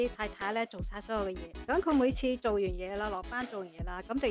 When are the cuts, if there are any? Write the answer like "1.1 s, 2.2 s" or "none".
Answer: 1.5 s